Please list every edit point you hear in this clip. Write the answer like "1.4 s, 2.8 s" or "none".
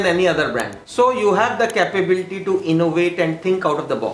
none